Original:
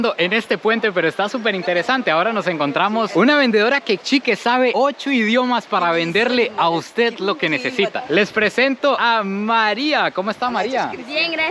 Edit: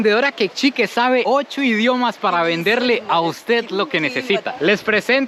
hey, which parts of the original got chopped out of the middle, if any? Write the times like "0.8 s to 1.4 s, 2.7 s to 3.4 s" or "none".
none